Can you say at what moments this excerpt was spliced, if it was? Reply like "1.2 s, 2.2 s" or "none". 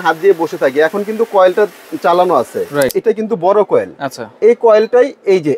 3.0 s